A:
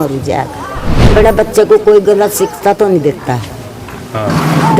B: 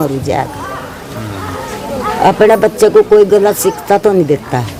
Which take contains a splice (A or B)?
A